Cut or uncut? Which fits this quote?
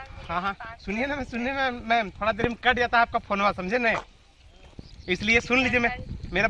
uncut